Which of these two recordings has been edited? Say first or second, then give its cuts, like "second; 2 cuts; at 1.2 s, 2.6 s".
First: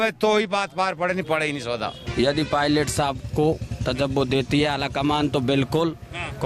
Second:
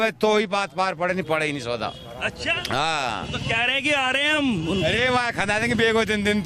first; 1 cut; at 2.0 s